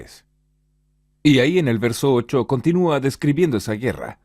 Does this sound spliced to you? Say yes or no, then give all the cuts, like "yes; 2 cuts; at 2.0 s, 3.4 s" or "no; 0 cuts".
yes; 1 cut; at 3.1 s